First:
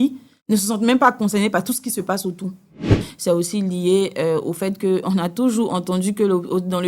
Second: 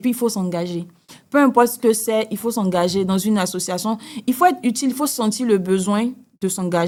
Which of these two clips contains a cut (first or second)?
first